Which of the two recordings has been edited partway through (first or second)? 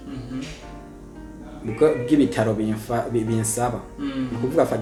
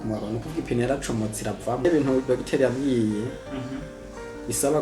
second